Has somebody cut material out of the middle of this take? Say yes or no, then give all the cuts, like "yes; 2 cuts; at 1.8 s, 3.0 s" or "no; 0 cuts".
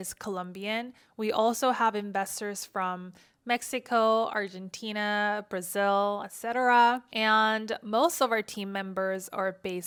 no; 0 cuts